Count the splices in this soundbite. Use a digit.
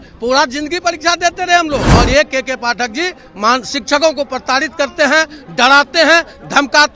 1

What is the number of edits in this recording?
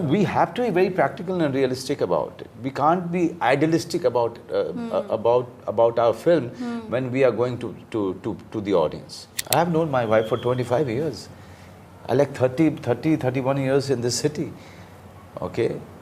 1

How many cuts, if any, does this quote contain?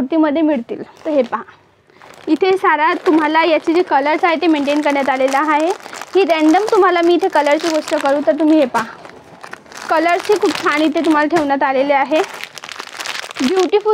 1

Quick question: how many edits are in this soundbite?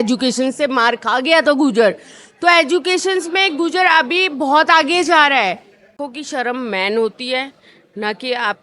1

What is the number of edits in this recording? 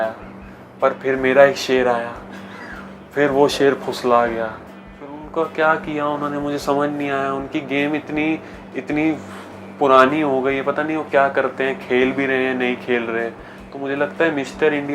0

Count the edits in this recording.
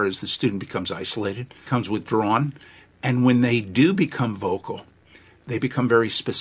2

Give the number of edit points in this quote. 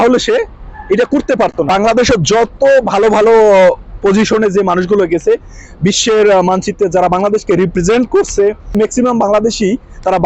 2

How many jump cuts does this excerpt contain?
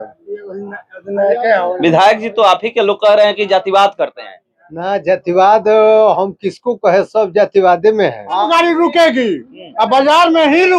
1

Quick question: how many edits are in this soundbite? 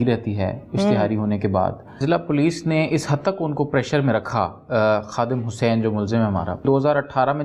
2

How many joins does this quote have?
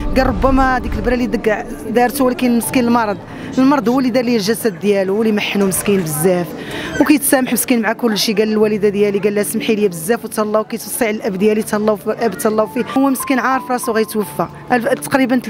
1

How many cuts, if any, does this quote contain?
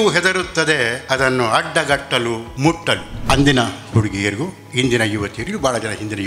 2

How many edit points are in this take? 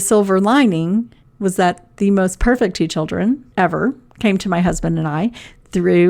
2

